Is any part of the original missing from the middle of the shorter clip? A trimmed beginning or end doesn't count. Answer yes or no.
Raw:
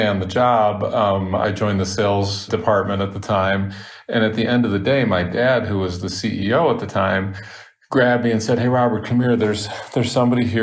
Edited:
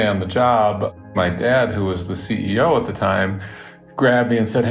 yes